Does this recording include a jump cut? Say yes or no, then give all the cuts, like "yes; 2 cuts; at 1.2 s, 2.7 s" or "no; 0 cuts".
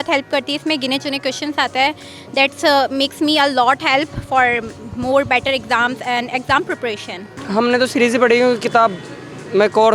yes; 1 cut; at 7.4 s